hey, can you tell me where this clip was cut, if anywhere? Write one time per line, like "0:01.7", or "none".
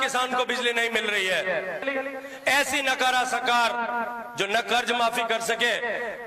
0:01.8